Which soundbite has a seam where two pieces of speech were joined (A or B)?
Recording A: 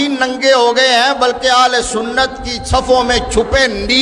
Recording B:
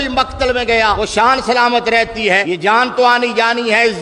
B